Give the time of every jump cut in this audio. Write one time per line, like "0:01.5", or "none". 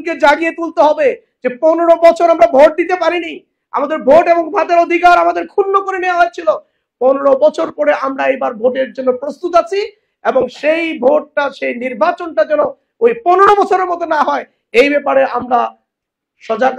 none